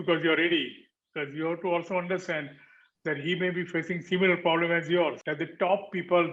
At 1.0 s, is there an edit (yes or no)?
no